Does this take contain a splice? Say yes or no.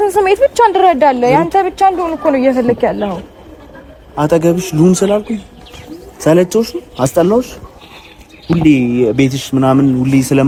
no